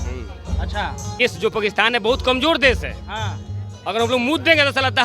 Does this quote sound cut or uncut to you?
cut